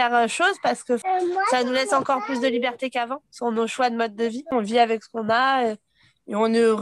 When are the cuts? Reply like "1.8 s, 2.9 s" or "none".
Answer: 1.0 s, 4.5 s